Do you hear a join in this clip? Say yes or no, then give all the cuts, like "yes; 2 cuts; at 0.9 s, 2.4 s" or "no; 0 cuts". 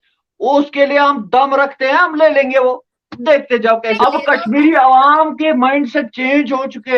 yes; 1 cut; at 4.0 s